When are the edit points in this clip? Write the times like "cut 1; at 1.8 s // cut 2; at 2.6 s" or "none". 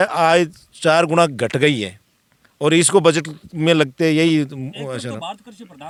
none